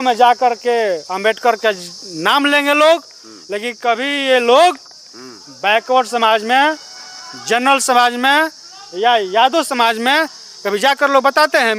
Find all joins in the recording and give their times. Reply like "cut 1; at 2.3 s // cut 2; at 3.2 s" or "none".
none